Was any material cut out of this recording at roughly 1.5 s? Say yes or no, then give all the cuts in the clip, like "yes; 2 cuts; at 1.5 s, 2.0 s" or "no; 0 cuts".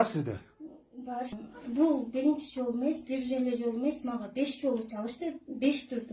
yes; 1 cut; at 1.5 s